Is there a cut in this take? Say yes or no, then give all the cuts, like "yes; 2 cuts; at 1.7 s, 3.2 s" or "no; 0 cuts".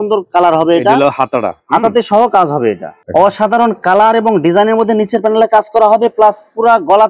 yes; 1 cut; at 2.9 s